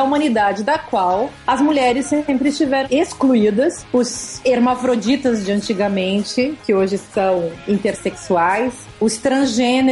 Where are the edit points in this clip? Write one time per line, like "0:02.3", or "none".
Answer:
0:01.4
0:02.8
0:04.0
0:07.1
0:08.9